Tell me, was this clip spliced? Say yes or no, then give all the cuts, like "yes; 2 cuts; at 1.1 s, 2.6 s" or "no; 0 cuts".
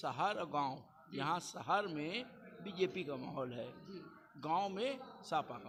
no; 0 cuts